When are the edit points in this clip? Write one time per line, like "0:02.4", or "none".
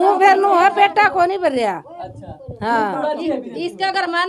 none